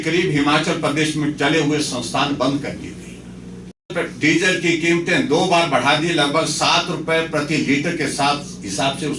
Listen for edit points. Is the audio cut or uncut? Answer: cut